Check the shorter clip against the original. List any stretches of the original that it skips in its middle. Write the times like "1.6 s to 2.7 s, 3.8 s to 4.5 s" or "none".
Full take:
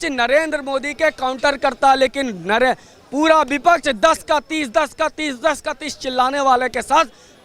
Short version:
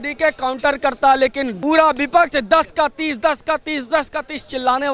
2.3 s to 3.0 s